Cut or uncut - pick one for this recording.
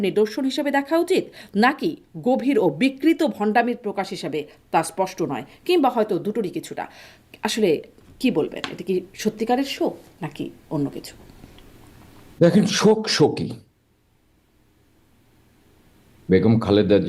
uncut